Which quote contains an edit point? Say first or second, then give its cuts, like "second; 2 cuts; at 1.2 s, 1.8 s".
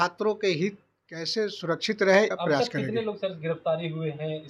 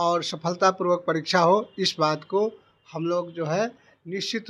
first; 1 cut; at 2.3 s